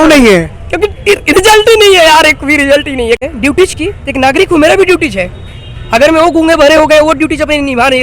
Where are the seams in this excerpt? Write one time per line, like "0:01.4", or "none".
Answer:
0:03.2